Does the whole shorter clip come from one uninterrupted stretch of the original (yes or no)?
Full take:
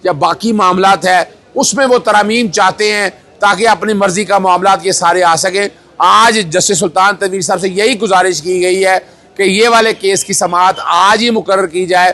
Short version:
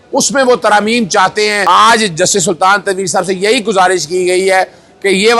no